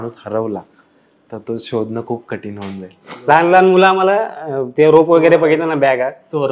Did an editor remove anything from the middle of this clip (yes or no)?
yes